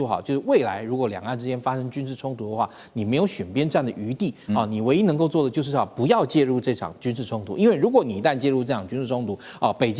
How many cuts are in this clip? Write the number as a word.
zero